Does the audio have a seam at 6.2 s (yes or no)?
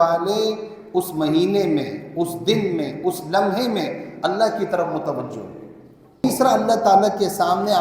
yes